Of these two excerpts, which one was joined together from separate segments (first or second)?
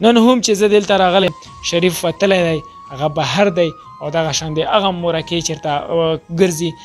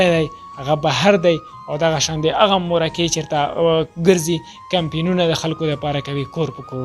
first